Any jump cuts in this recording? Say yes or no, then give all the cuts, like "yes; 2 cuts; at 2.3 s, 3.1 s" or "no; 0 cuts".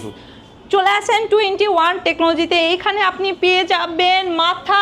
no; 0 cuts